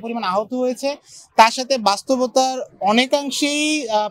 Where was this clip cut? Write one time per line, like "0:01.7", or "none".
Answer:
none